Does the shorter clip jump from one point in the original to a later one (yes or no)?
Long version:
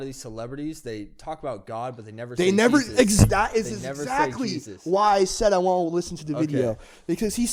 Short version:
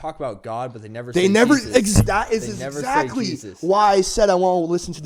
no